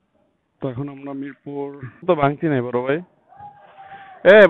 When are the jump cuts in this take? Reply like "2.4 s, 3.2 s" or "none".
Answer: 2.0 s